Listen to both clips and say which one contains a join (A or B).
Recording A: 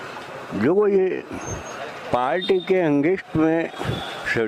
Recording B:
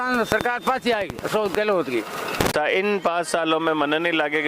B